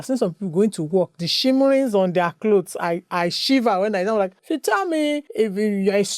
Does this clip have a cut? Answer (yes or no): yes